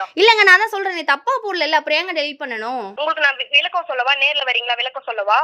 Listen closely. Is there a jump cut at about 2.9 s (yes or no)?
yes